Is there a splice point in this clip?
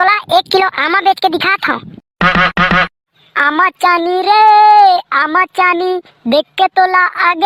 no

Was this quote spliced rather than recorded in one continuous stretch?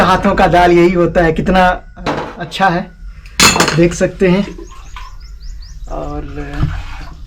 no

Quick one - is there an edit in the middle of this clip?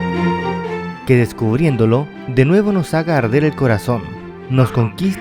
yes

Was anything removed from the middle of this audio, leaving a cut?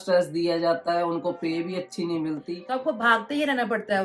yes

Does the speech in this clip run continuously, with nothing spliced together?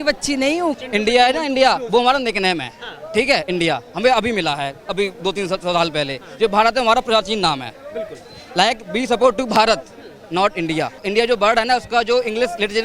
no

